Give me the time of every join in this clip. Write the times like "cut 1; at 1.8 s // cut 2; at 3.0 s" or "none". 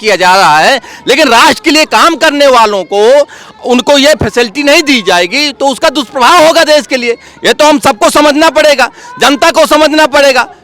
none